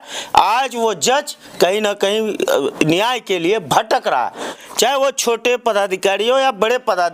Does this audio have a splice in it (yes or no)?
no